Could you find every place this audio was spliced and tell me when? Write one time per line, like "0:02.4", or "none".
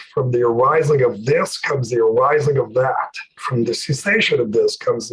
0:03.4